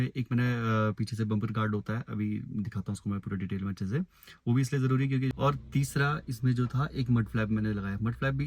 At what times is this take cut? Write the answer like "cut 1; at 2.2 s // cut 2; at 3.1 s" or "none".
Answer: cut 1; at 5.3 s